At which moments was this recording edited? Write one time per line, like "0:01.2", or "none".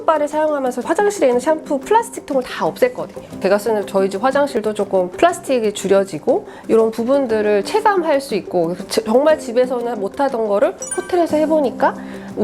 0:00.8
0:03.4
0:04.8